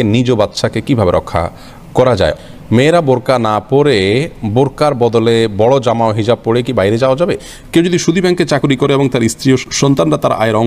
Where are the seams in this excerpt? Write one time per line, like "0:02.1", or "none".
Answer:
0:02.3
0:07.4
0:09.7